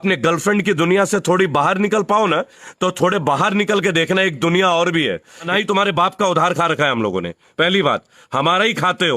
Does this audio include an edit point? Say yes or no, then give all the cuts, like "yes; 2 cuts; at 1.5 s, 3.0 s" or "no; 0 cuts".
yes; 1 cut; at 5.3 s